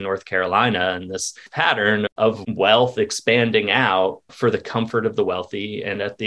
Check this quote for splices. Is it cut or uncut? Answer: cut